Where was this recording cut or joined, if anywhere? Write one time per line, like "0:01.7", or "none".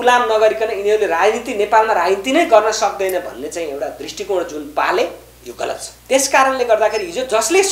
0:05.9